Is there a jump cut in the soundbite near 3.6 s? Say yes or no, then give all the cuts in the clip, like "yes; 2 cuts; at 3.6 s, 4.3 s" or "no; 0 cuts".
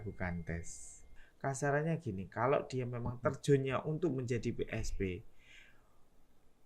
no; 1 cut; at 1.1 s